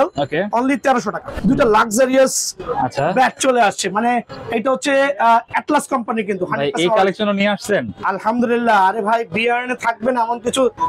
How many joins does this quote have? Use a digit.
1